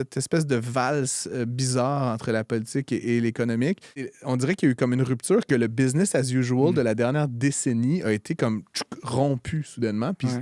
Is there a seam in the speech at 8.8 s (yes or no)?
no